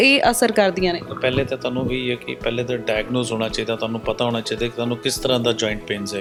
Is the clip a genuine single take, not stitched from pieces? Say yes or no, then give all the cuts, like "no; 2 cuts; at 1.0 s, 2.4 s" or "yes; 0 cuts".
yes; 0 cuts